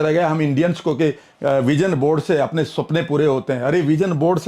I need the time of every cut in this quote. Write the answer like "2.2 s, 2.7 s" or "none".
1.3 s